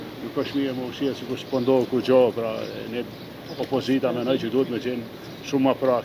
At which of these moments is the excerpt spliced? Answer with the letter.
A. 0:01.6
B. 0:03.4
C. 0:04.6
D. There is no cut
D